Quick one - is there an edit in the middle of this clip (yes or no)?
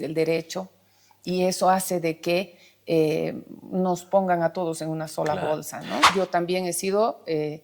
yes